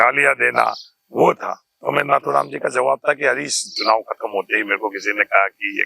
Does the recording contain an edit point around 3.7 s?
yes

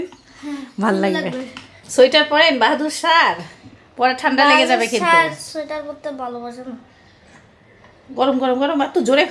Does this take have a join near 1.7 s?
no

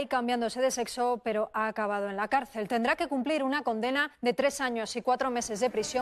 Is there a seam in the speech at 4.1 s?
yes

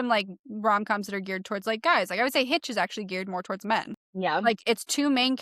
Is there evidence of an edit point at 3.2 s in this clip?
no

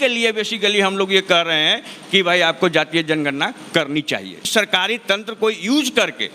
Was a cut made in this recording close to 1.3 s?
no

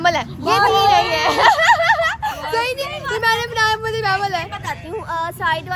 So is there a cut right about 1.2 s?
no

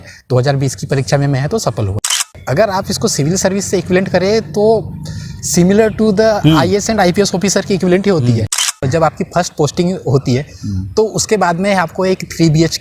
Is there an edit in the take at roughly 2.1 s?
yes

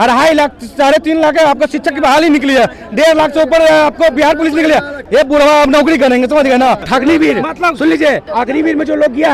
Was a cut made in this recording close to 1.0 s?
no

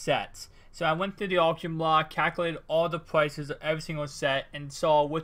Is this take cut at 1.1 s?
no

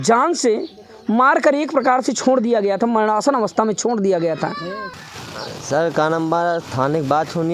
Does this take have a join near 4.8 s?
yes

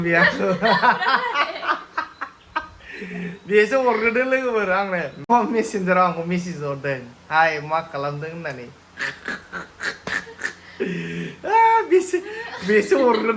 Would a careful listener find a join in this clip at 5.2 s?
yes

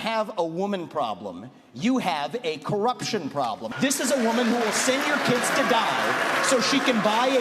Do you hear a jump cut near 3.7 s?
yes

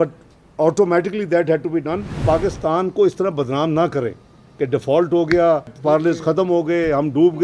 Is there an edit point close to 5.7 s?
yes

